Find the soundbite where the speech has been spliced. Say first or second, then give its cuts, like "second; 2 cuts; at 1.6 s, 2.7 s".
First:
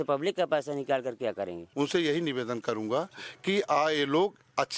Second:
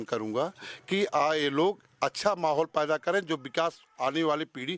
first; 1 cut; at 1.6 s